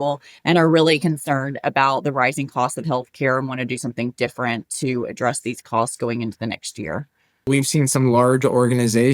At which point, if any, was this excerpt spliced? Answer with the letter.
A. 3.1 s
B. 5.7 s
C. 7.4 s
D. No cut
C